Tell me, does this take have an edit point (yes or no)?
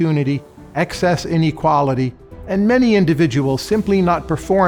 no